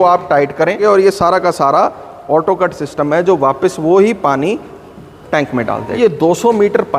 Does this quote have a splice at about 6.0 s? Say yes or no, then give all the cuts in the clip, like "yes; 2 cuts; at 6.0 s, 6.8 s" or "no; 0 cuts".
yes; 2 cuts; at 0.8 s, 6.0 s